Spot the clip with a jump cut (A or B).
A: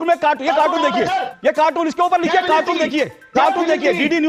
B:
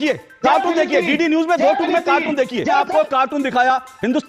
B